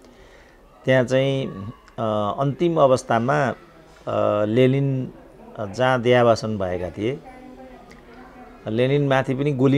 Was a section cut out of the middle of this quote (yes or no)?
no